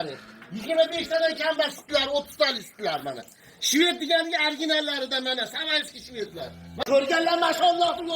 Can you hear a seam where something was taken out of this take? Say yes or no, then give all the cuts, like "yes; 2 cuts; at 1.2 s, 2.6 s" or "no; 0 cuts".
yes; 1 cut; at 6.8 s